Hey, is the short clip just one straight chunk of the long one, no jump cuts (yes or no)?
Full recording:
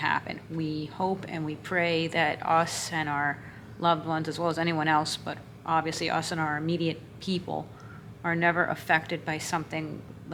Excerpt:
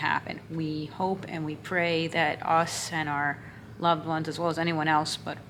yes